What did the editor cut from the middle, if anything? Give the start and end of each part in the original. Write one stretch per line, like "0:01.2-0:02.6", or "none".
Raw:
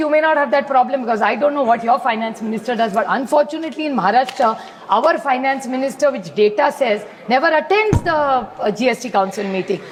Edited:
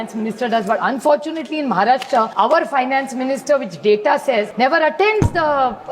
0:04.6-0:04.8
0:07.0-0:07.2